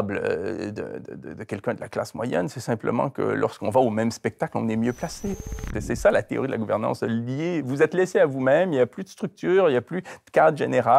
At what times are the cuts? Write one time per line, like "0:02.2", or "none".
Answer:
0:05.7

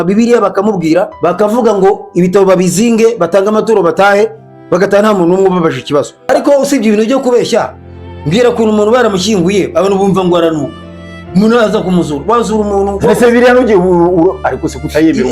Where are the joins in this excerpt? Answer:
0:01.1
0:06.3

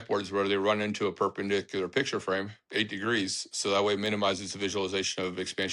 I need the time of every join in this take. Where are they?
none

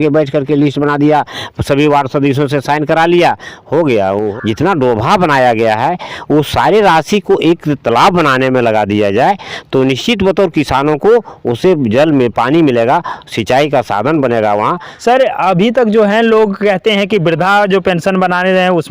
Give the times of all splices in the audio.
0:04.3
0:14.9

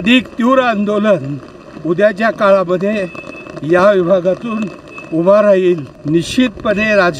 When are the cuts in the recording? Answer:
0:05.9

